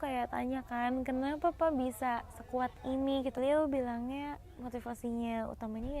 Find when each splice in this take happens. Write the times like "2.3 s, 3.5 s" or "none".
3.4 s